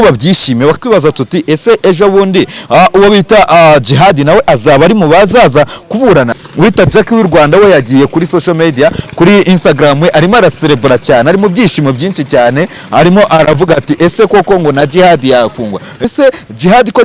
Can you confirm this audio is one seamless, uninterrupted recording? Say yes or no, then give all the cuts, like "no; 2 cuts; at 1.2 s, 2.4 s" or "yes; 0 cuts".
no; 3 cuts; at 0.8 s, 6.3 s, 16.0 s